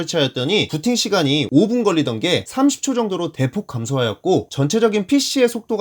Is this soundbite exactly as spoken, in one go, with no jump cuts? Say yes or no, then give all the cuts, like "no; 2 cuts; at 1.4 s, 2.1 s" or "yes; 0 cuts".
no; 1 cut; at 1.5 s